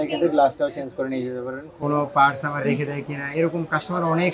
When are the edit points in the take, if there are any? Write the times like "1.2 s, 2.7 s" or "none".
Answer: 1.7 s